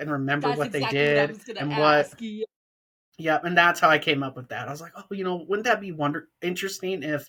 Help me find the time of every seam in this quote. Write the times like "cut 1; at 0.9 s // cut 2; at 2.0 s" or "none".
none